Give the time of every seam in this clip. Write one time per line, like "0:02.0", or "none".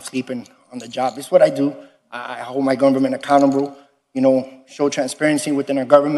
none